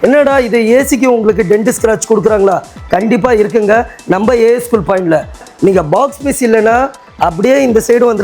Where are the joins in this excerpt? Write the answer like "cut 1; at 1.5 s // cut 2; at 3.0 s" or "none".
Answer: none